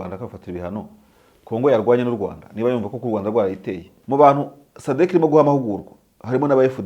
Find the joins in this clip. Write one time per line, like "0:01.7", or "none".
0:03.9